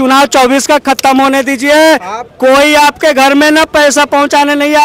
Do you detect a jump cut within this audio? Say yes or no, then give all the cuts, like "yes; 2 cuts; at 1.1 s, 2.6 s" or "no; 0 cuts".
no; 0 cuts